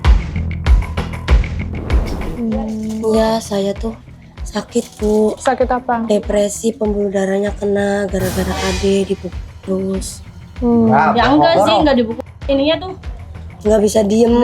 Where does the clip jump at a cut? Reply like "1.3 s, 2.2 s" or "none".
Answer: 2.3 s